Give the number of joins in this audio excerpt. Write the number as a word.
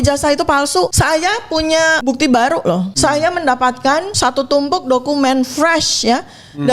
four